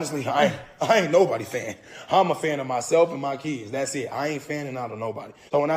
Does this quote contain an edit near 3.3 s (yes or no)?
no